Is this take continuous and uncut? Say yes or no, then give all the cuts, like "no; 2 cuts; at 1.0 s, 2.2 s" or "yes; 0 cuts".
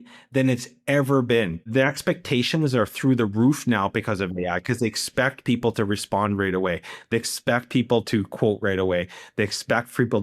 no; 1 cut; at 1.6 s